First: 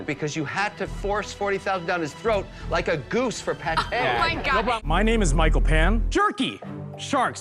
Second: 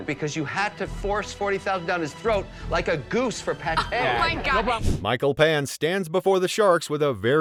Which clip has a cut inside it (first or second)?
first